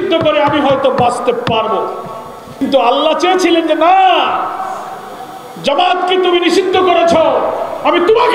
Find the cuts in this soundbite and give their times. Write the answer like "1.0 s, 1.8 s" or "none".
2.6 s